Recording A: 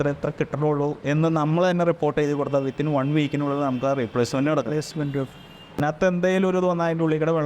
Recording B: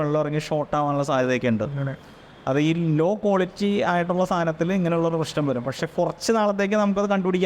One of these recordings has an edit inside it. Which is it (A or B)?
A